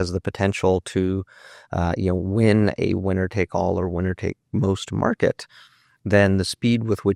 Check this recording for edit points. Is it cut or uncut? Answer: uncut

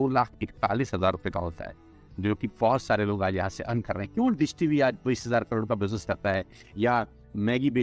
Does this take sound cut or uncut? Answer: uncut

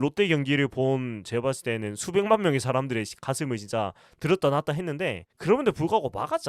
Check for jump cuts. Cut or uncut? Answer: uncut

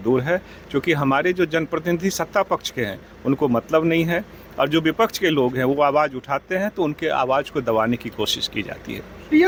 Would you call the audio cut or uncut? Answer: uncut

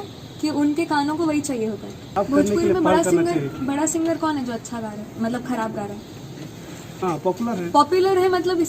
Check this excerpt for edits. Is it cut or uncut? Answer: cut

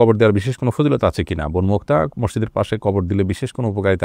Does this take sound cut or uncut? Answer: uncut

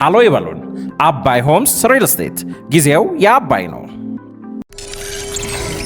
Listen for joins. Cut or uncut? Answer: cut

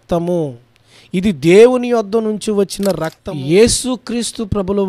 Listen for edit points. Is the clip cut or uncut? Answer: cut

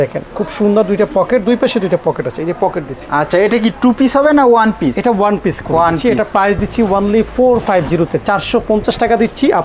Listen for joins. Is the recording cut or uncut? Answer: uncut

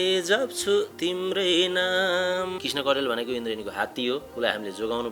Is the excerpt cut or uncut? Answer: cut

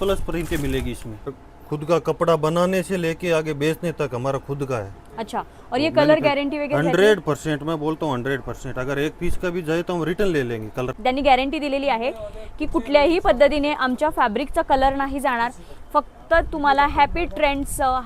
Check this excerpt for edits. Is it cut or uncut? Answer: cut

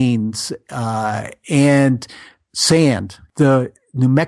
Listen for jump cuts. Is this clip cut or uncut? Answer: cut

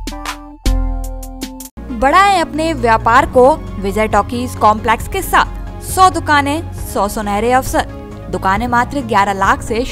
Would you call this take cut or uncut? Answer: uncut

